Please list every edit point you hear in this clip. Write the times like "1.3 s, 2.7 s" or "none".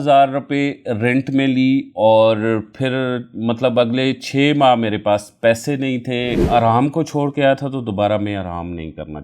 6.4 s